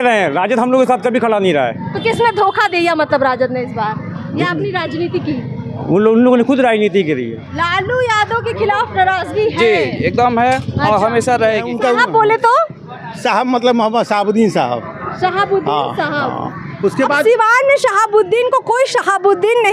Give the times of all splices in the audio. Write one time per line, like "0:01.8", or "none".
0:07.4
0:11.7